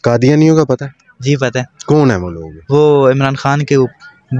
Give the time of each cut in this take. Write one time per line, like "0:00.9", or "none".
none